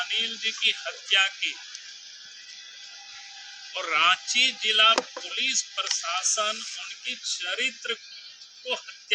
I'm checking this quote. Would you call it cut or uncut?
uncut